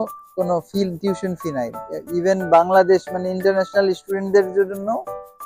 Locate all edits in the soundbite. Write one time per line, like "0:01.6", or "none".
none